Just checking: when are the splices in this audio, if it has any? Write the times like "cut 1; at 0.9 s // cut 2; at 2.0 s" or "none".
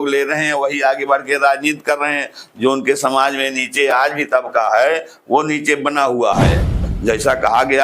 cut 1; at 6.8 s